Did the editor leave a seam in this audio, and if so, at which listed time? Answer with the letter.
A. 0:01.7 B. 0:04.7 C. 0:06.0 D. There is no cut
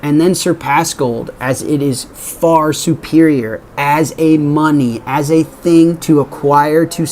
C